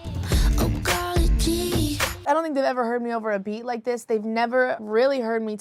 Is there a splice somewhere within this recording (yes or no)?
yes